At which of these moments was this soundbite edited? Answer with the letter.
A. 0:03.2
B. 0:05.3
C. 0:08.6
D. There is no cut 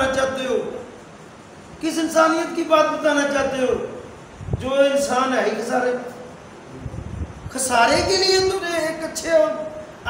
C